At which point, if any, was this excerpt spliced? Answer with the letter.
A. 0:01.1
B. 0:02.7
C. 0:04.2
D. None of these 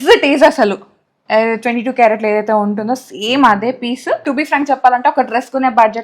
C